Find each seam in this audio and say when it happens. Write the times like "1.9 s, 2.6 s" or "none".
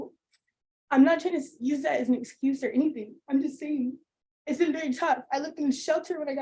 none